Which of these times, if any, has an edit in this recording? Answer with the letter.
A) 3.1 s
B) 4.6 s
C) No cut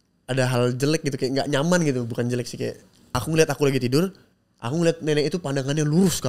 A